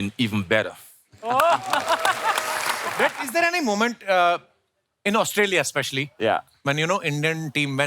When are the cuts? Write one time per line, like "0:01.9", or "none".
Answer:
0:02.9